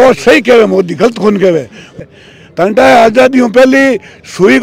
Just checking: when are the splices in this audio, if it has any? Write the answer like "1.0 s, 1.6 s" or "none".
2.0 s